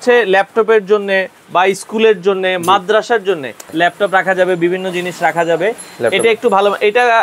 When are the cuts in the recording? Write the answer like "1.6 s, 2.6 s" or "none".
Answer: 3.6 s